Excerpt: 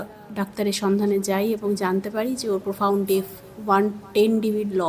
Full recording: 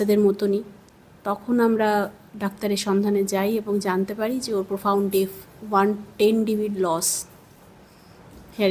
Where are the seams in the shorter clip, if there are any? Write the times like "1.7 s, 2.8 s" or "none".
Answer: none